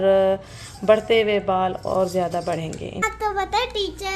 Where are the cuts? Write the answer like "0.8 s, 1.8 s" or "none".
3.0 s